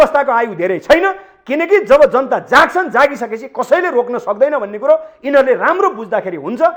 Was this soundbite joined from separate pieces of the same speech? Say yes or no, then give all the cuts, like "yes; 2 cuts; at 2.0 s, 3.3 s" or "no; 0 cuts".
no; 0 cuts